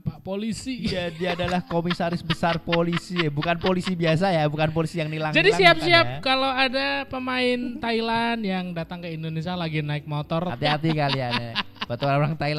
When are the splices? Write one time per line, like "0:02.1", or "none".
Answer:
0:10.5